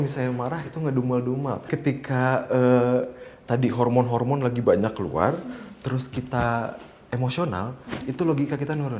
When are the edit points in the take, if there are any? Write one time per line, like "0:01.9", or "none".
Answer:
0:01.7